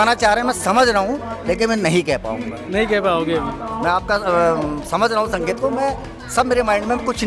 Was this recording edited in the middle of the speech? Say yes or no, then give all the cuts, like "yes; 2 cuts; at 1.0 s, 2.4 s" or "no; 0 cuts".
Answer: no; 0 cuts